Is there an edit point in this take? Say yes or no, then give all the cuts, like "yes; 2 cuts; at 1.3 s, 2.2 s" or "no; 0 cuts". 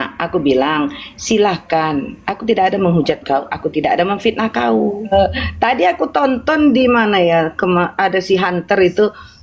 yes; 1 cut; at 5.1 s